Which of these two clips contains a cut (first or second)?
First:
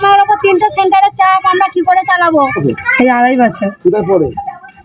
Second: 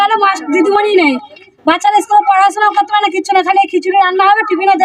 first